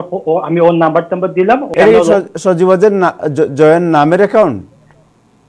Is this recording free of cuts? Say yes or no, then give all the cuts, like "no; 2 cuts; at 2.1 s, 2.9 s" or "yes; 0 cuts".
no; 1 cut; at 1.7 s